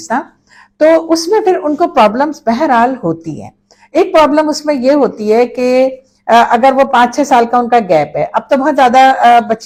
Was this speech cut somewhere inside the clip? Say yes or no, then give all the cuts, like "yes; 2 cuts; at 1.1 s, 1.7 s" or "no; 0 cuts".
no; 0 cuts